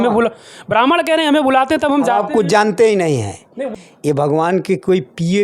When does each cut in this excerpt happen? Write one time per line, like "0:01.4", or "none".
0:03.6